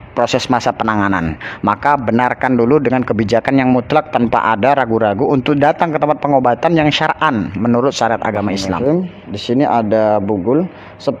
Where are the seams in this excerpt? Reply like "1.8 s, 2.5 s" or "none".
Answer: 8.7 s

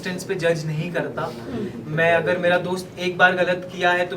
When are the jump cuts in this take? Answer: none

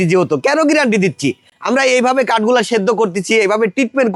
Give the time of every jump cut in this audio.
none

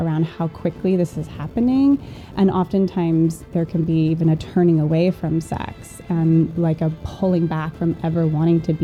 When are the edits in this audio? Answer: none

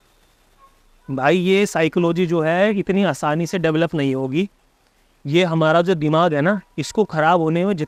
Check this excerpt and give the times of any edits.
none

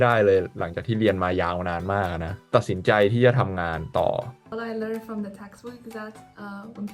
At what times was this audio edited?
4.4 s

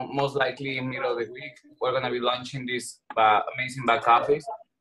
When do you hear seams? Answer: none

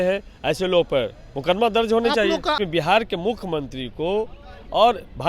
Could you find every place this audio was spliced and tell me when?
2.6 s

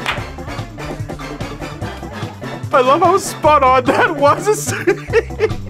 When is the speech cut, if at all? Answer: 2.6 s

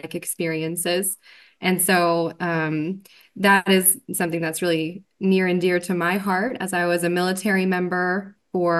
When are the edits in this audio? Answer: none

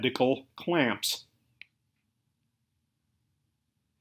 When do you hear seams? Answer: none

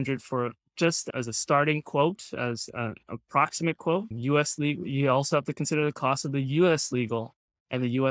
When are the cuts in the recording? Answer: 1.0 s

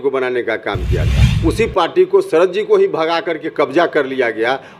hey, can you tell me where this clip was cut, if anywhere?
1.2 s

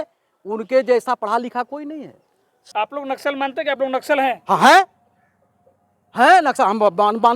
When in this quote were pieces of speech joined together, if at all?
2.7 s

